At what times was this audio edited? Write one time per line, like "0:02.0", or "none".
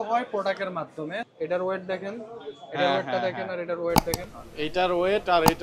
0:01.3